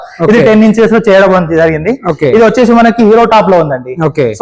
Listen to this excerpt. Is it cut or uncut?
uncut